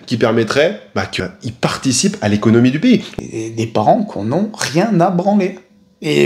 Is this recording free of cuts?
no; 2 cuts; at 1.1 s, 3.1 s

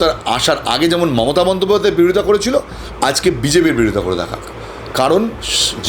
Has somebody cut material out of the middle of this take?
no; 0 cuts

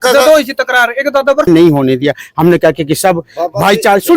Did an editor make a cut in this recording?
yes; 1 cut; at 1.5 s

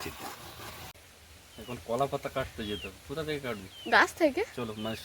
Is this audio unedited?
no; 1 cut; at 0.9 s

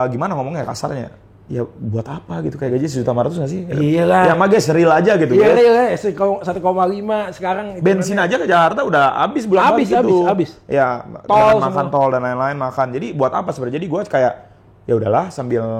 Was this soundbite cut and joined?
no; 0 cuts

